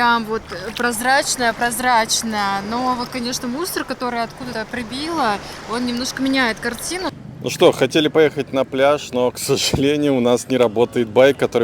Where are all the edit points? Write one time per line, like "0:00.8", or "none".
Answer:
0:04.5
0:07.1